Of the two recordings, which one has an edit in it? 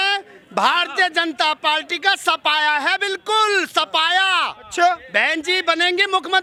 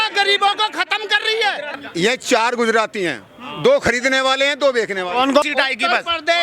second; 2 cuts; at 1.7 s, 5.4 s

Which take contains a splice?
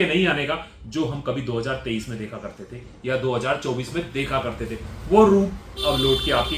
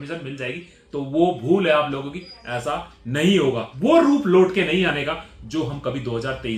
second; 1 cut; at 3.7 s

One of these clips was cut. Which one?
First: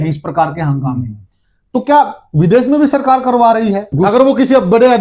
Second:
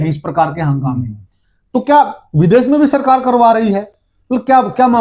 first; 1 cut; at 3.9 s

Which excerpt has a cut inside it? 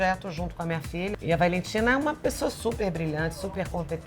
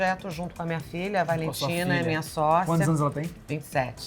first; 1 cut; at 1.1 s

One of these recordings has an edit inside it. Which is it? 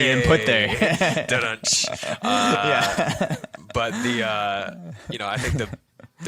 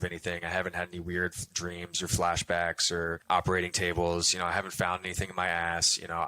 second; 1 cut; at 3.2 s

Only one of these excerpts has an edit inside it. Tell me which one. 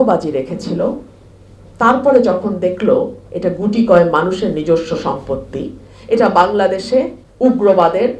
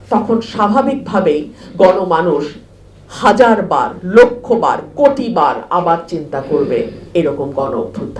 first; 1 cut; at 7.2 s

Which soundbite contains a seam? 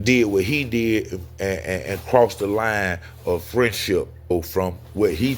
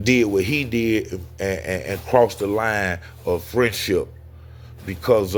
first; 1 cut; at 4.3 s

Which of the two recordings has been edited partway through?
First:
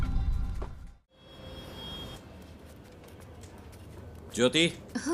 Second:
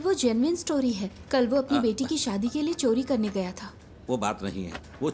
first; 1 cut; at 1.1 s

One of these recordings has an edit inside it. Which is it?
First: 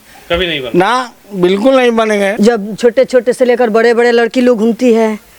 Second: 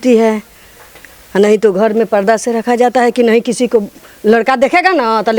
first; 1 cut; at 2.3 s

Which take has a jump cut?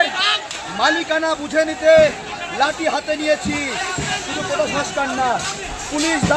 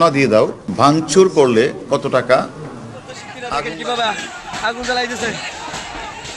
second; 1 cut; at 3.3 s

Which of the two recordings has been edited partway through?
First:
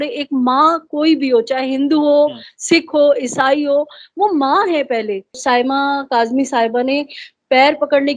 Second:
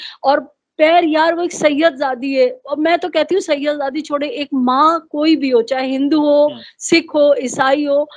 first; 1 cut; at 5.4 s

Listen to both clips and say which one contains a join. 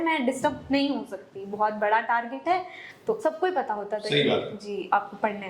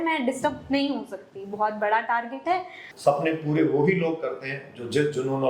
second; 1 cut; at 2.8 s

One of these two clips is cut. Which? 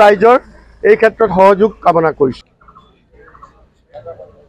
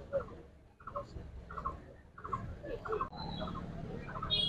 first; 1 cut; at 2.4 s

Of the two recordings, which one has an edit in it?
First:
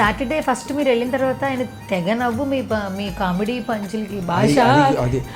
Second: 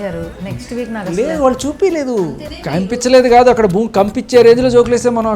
second; 1 cut; at 2.3 s

